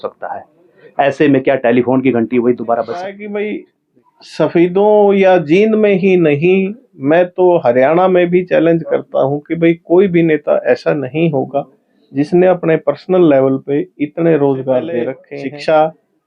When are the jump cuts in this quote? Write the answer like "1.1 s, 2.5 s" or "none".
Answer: 3.2 s, 15.2 s